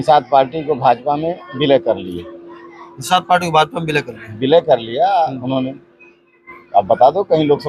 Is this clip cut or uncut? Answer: uncut